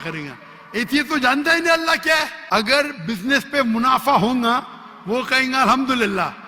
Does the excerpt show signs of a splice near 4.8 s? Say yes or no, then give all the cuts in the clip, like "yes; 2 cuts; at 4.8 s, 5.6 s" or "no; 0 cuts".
no; 1 cut; at 2.4 s